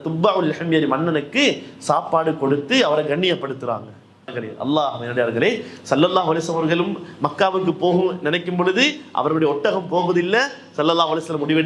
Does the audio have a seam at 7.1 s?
no; 1 cut; at 4.4 s

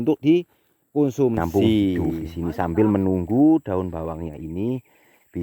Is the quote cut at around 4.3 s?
no; 1 cut; at 2.4 s

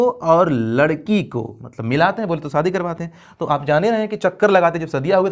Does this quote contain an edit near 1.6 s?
no; 0 cuts

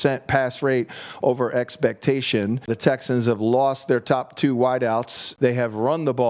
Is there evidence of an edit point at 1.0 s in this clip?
no; 2 cuts; at 2.7 s, 5.2 s

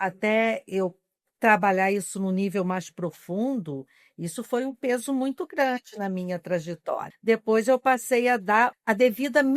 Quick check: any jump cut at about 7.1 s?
yes; 2 cuts; at 7.1 s, 8.8 s

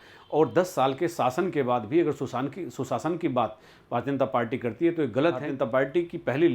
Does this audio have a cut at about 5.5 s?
yes; 1 cut; at 5.5 s

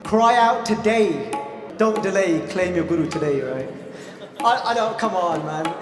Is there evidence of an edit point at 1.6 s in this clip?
yes; 1 cut; at 1.6 s

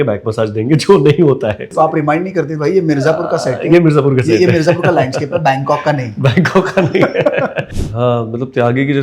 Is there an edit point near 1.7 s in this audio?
yes; 2 cuts; at 1.7 s, 7.6 s

